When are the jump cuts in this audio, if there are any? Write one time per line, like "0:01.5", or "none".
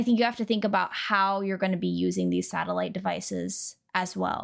none